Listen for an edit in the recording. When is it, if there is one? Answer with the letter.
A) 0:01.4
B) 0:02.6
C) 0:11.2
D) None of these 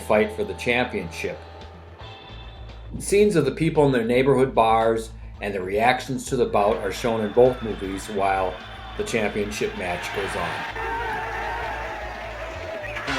A